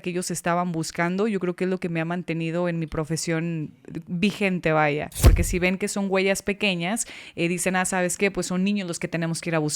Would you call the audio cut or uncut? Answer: cut